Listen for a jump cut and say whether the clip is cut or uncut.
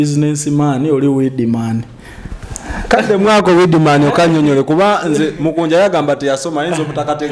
uncut